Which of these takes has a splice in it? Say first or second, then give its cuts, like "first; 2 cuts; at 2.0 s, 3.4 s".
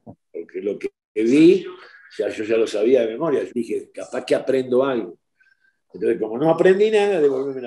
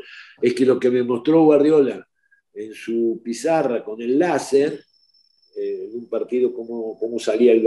first; 1 cut; at 3.5 s